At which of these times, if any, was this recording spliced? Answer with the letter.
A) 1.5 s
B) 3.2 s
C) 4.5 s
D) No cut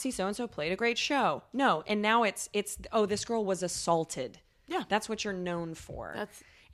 D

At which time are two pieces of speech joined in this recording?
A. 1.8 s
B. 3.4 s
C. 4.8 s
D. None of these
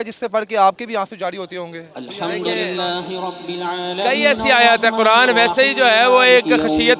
D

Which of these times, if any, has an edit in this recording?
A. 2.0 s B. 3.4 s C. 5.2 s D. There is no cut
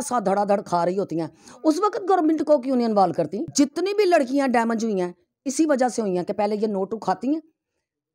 B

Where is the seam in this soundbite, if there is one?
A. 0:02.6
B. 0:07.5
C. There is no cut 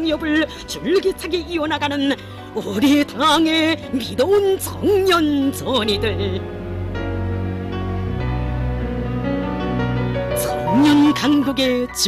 B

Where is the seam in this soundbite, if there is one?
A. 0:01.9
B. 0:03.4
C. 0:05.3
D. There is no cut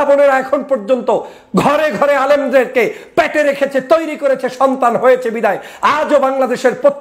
D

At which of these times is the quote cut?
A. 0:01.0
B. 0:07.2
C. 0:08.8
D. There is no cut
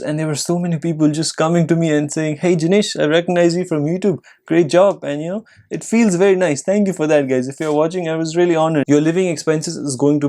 C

